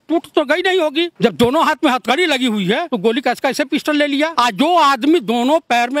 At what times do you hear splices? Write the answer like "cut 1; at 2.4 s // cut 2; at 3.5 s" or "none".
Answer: cut 1; at 1.1 s // cut 2; at 2.9 s // cut 3; at 4.3 s